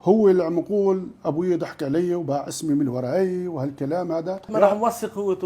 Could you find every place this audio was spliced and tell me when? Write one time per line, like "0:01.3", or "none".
0:04.5